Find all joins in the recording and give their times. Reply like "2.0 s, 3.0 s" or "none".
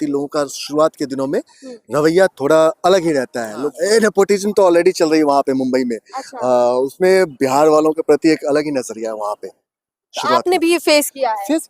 3.7 s

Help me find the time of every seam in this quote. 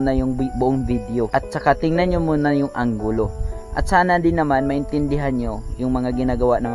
1.3 s

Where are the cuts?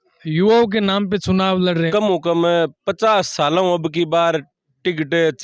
1.9 s

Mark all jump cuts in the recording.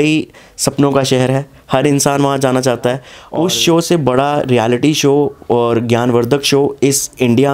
3.2 s

